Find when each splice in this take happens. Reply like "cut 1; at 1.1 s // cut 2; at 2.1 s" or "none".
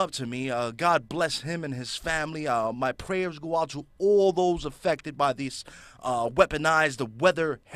none